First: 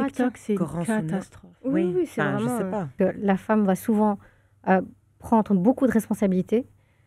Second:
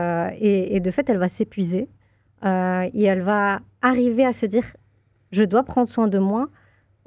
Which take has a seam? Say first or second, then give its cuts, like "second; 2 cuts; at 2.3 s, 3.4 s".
first; 1 cut; at 3.0 s